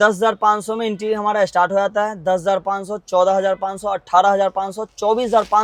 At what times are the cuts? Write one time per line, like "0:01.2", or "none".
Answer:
none